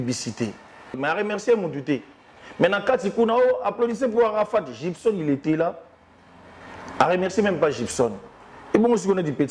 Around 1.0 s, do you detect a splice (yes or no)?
yes